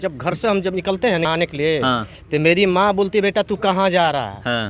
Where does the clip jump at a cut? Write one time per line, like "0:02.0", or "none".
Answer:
0:01.3